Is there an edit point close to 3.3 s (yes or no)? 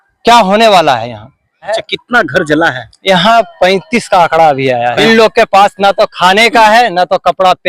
no